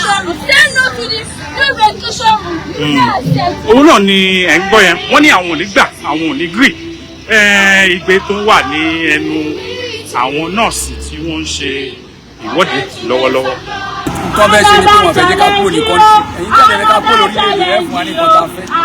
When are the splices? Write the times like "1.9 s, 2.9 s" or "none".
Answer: 14.1 s